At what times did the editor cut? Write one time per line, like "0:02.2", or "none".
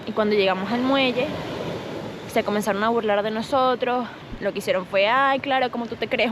0:04.2